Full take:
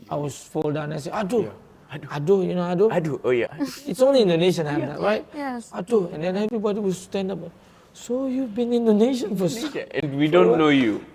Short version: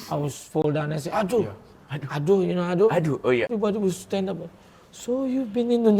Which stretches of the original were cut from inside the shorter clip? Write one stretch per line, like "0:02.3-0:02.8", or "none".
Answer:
0:03.5-0:06.5